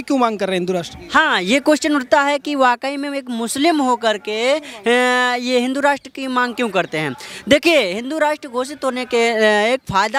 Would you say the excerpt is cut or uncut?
uncut